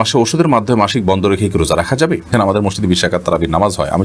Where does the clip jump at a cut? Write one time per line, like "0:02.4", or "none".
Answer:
0:02.4